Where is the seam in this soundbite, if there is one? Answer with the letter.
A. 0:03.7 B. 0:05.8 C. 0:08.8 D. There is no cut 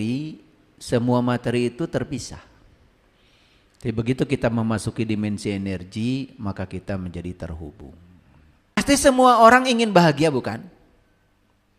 C